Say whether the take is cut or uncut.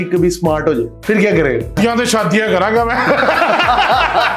cut